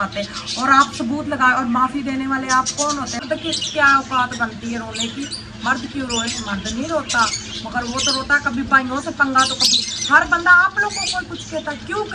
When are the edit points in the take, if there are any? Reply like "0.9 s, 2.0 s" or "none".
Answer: 3.2 s